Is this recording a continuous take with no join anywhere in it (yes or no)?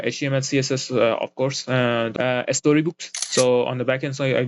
no